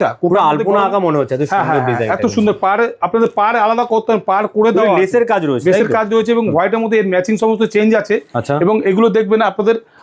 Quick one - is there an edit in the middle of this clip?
no; 0 cuts

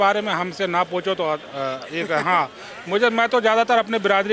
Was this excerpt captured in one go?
yes; 0 cuts

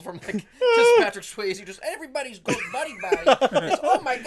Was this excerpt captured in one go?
yes; 0 cuts

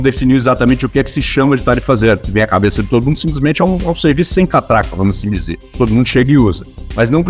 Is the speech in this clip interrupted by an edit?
no; 0 cuts

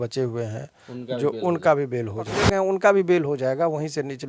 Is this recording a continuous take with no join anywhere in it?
no; 1 cut; at 2.4 s

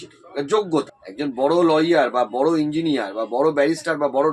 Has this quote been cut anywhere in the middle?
yes; 1 cut; at 1.0 s

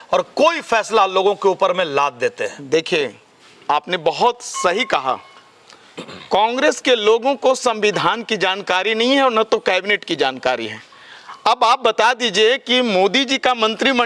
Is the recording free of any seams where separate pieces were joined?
yes; 0 cuts

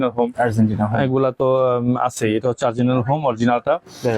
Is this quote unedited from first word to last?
yes; 0 cuts

